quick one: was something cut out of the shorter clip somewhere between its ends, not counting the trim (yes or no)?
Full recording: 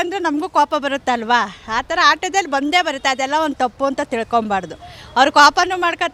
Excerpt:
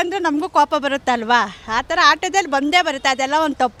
no